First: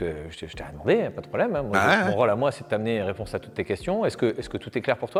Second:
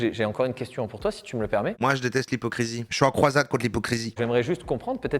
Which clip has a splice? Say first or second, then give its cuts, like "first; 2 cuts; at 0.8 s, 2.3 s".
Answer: second; 1 cut; at 4.1 s